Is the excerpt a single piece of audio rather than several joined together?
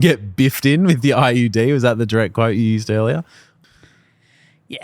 no; 1 cut; at 3.5 s

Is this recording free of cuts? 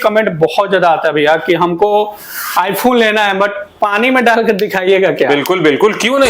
yes; 0 cuts

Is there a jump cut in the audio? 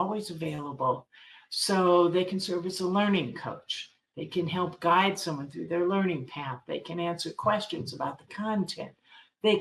no; 0 cuts

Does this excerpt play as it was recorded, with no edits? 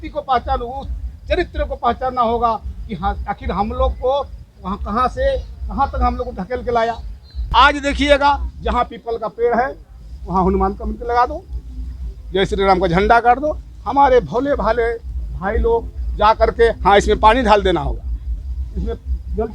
no; 1 cut; at 7.3 s

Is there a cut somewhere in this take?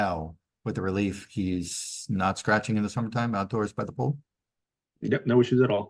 no; 0 cuts

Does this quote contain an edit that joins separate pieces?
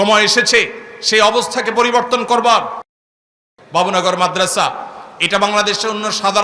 yes; 1 cut; at 3.0 s

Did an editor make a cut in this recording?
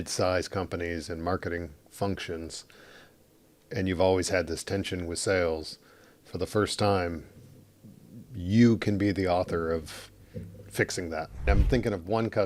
yes; 1 cut; at 11.5 s

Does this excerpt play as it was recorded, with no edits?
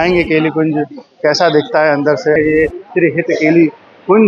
no; 1 cut; at 2.4 s

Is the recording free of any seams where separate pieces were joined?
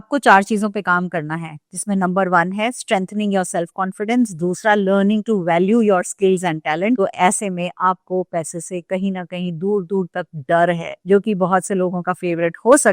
no; 2 cuts; at 7.0 s, 11.0 s

